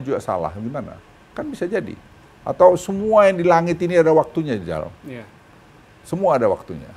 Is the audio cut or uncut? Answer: uncut